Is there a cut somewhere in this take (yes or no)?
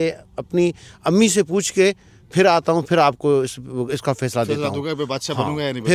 no